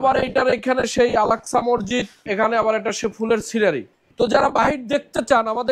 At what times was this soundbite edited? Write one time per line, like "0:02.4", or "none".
0:02.2
0:04.0

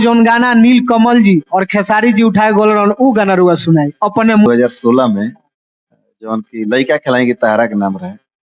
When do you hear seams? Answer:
0:04.5

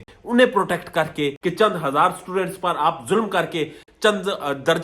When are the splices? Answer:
0:01.4

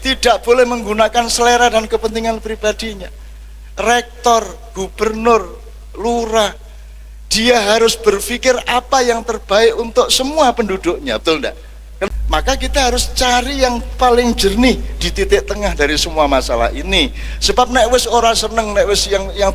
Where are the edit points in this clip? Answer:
0:12.1

